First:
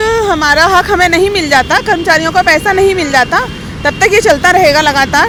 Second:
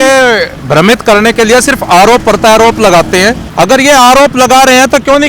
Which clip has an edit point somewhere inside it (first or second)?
second